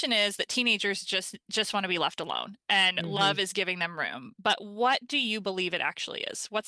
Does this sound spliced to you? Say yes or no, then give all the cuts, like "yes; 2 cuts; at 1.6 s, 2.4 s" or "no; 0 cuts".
no; 0 cuts